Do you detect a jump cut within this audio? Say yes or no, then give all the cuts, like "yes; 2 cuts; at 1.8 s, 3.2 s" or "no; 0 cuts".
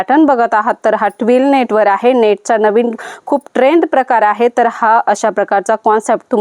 no; 0 cuts